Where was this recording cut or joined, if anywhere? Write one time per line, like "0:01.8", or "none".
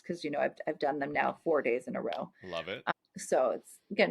0:02.7